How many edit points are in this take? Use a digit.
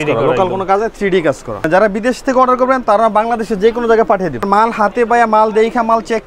2